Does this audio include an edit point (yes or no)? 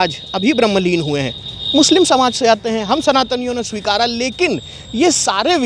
no